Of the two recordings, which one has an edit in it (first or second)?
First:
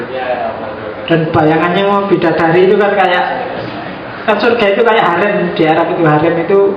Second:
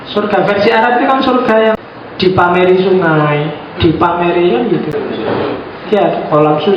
second